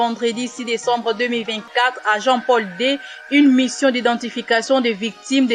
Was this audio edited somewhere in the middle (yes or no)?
no